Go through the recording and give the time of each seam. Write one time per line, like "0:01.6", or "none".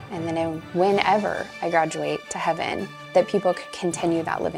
0:02.9